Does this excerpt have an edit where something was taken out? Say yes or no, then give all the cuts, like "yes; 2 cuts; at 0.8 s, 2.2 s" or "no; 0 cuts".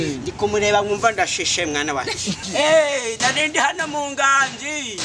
yes; 1 cut; at 2.5 s